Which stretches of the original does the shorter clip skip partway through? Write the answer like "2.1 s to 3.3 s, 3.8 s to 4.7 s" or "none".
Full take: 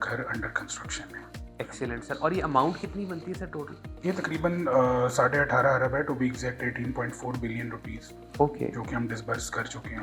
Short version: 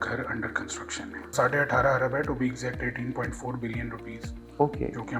1.3 s to 5.1 s